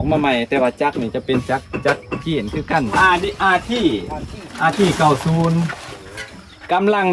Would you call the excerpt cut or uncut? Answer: cut